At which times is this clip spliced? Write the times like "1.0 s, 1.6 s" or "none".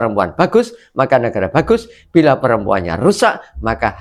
none